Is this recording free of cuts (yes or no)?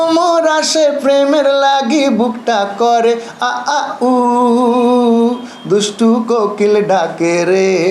yes